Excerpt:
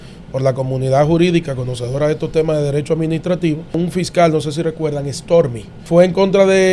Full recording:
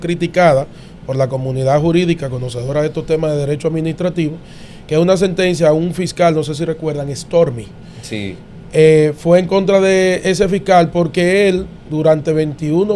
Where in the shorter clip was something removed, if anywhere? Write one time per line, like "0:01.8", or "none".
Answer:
0:03.8
0:05.8